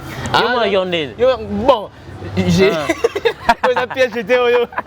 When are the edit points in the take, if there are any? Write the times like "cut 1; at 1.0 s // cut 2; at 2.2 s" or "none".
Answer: none